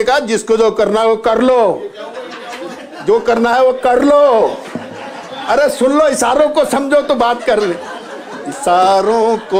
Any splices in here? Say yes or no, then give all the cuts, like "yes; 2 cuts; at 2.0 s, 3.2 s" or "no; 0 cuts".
no; 0 cuts